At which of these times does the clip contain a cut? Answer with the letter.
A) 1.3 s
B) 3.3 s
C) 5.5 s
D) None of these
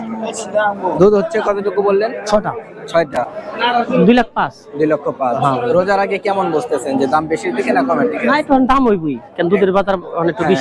B